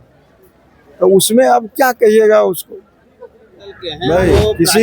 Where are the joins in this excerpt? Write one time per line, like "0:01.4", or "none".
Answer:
0:03.9